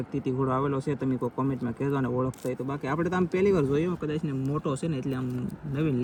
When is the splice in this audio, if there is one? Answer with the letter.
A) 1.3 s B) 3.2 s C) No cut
C